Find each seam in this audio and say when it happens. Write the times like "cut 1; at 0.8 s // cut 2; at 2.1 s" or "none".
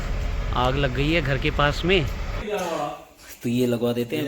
cut 1; at 2.4 s